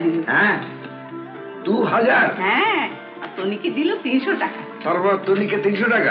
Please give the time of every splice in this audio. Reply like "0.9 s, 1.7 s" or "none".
none